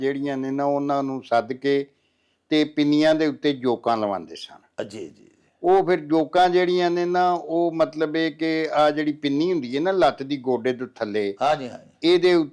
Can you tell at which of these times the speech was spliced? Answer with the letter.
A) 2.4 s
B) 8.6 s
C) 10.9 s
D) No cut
D